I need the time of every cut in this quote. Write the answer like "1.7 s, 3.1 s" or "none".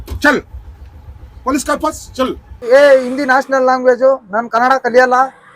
2.6 s